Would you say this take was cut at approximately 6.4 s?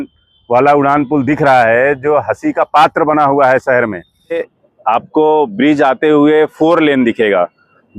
no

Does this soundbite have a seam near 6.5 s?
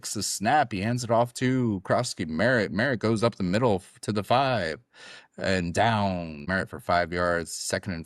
yes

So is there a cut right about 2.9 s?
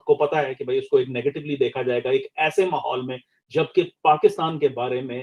no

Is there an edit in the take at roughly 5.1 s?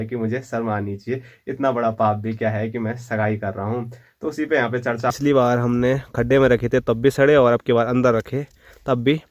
yes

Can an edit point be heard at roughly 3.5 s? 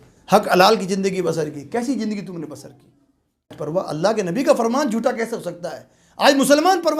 yes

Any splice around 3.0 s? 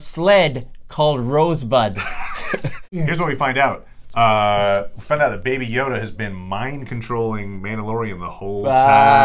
yes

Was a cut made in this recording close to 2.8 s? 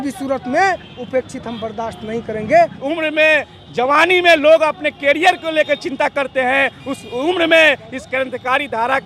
yes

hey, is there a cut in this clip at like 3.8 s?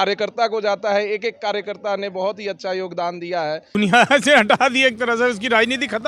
yes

